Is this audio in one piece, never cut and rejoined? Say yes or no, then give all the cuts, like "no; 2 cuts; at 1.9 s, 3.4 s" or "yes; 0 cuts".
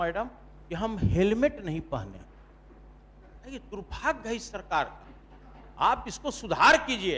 yes; 0 cuts